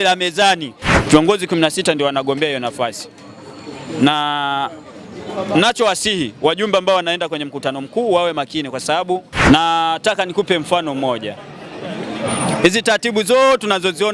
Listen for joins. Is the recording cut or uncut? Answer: cut